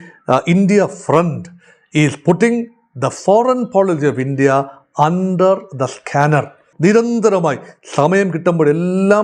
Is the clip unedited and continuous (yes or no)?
no